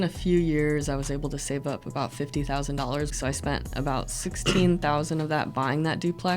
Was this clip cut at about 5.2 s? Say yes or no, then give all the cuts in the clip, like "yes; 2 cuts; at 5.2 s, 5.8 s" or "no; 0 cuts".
no; 1 cut; at 3.1 s